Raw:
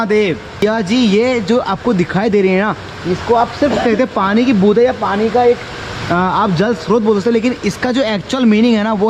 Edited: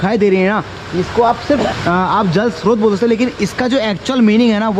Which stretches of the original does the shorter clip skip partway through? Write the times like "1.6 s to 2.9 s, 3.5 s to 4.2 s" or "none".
3.8 s to 5.9 s